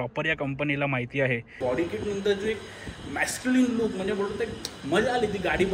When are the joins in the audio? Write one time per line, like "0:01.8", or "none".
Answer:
0:01.6